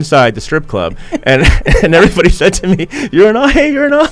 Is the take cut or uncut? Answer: uncut